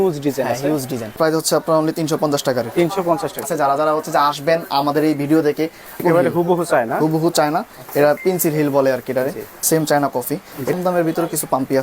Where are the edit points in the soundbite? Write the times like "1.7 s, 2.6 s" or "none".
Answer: 1.1 s, 3.4 s, 6.0 s, 9.5 s, 10.7 s